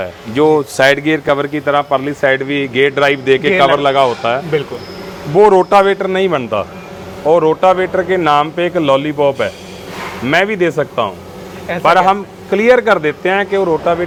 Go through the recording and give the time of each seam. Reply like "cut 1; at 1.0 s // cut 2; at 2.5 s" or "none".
none